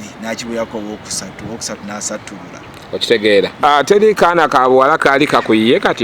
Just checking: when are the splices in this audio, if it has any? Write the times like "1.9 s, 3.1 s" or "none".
3.6 s